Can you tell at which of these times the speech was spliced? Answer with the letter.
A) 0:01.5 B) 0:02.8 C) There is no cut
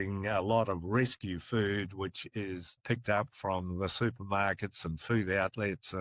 B